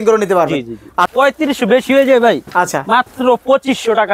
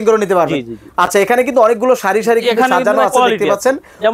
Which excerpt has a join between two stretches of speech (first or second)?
first